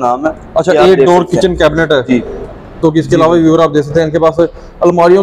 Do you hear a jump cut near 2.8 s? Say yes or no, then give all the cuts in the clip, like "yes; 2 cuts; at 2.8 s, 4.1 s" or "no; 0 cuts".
yes; 1 cut; at 2.8 s